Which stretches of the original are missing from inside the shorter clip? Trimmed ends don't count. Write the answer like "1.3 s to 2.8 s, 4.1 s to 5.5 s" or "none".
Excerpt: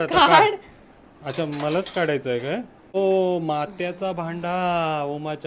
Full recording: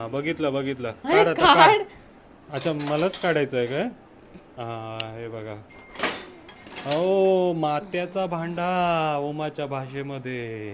4.2 s to 7.1 s